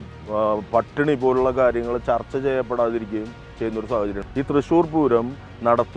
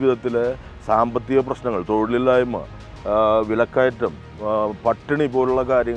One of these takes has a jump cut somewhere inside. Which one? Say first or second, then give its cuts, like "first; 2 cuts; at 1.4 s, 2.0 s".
first; 1 cut; at 4.2 s